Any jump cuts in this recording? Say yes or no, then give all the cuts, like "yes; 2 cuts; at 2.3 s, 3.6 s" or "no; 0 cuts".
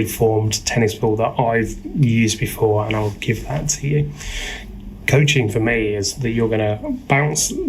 no; 0 cuts